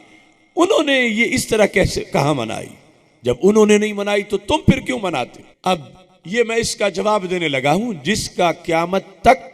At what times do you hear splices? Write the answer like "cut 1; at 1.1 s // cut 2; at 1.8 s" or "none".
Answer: cut 1; at 5.4 s